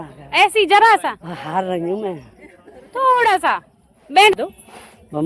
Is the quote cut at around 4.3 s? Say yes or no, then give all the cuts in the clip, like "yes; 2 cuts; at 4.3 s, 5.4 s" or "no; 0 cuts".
yes; 1 cut; at 4.3 s